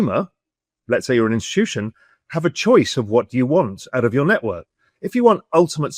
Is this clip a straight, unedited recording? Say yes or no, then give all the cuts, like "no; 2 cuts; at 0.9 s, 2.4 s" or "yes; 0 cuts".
yes; 0 cuts